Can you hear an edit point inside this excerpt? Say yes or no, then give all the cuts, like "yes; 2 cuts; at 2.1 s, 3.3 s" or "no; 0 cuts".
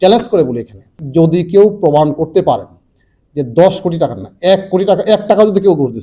yes; 1 cut; at 1.0 s